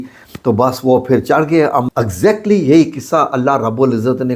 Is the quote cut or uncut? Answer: cut